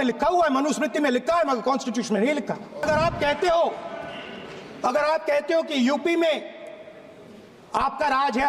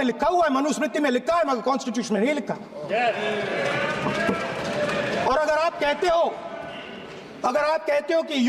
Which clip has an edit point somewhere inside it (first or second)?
first